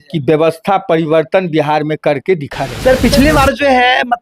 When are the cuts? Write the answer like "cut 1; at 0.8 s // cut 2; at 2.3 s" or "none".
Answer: cut 1; at 2.7 s